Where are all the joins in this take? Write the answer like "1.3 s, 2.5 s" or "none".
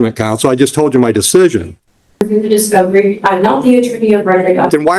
2.2 s

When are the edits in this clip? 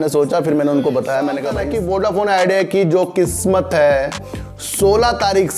1.6 s

